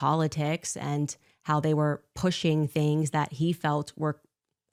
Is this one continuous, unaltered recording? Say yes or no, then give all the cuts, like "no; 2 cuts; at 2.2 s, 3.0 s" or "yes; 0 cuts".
yes; 0 cuts